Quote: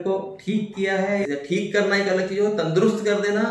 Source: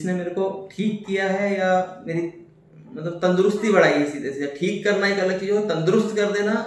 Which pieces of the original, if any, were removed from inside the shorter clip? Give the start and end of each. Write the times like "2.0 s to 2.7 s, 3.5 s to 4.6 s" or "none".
1.6 s to 4.4 s